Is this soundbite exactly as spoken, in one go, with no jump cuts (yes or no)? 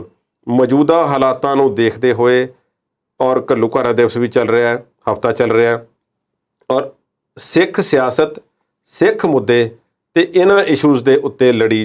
yes